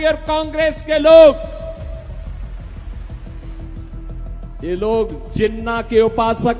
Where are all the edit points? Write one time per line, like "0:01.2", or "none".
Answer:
none

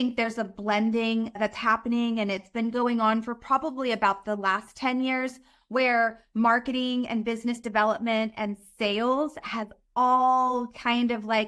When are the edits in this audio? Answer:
none

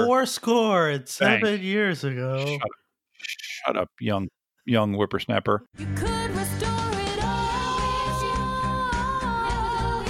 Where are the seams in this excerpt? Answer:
0:05.8

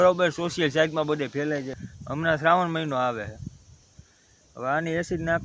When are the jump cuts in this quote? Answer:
0:01.7

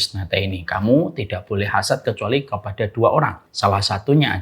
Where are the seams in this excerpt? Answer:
0:03.4

